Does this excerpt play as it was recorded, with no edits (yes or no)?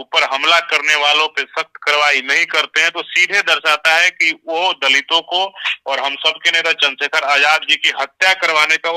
yes